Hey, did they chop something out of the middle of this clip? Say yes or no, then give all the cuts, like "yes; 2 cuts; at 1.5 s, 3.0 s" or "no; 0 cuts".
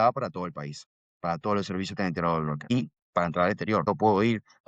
yes; 2 cuts; at 2.7 s, 3.8 s